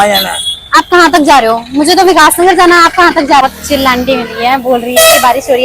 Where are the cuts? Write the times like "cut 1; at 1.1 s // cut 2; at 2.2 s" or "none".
cut 1; at 3.4 s